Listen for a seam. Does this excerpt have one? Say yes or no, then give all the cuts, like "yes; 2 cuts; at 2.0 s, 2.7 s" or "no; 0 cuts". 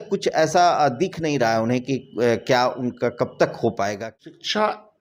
yes; 1 cut; at 4.0 s